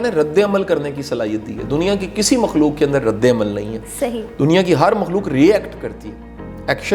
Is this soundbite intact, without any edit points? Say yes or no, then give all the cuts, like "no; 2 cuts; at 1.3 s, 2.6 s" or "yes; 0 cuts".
yes; 0 cuts